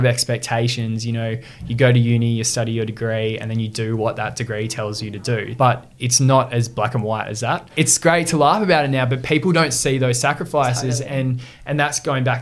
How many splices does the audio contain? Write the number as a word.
two